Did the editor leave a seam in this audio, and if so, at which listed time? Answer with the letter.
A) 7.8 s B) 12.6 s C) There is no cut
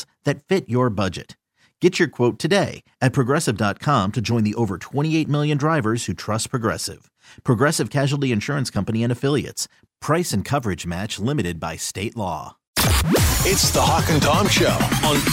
B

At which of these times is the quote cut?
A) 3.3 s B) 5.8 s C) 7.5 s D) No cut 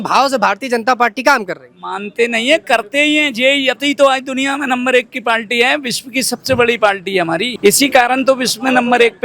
C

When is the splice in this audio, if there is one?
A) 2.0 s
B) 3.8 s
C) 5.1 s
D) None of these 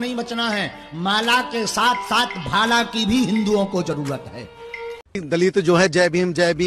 C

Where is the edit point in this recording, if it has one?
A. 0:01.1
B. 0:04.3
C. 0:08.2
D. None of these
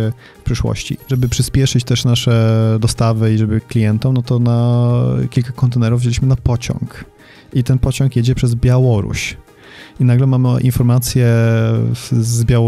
A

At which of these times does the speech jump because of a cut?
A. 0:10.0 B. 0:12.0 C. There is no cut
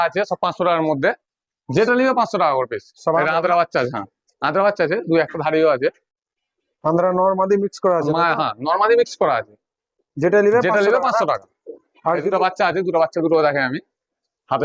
C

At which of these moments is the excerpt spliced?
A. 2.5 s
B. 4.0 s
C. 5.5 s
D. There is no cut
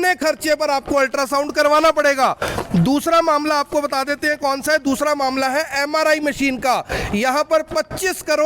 D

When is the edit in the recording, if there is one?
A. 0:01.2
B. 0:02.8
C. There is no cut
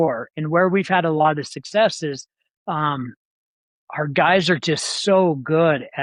C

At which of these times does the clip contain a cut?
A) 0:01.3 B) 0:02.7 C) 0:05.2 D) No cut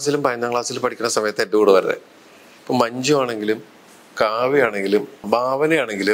C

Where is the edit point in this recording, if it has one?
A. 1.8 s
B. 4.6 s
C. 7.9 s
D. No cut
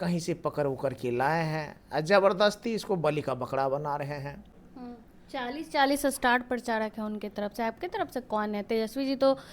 B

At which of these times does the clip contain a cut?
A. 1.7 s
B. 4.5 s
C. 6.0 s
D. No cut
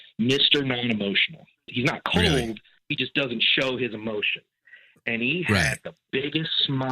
A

